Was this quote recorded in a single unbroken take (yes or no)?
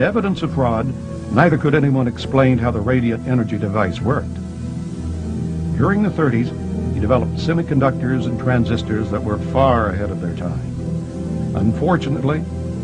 no